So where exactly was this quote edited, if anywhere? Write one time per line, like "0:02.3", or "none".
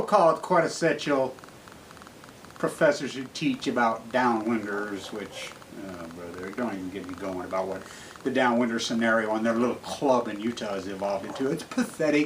0:09.8

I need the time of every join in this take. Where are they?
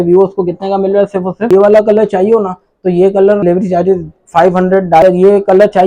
0:01.5
0:03.4
0:05.0

